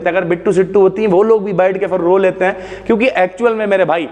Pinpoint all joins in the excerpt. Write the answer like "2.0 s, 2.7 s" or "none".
none

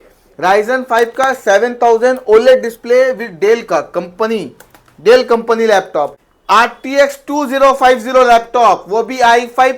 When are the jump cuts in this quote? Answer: 6.1 s

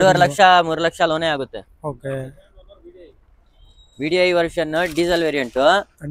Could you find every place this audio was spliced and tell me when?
none

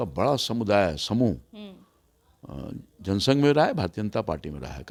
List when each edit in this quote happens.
none

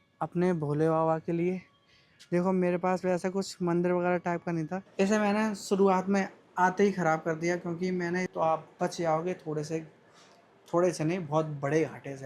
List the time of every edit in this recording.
4.8 s, 8.3 s

